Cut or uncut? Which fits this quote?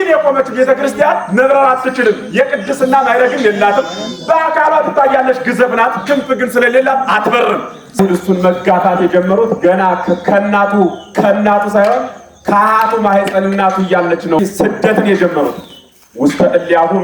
cut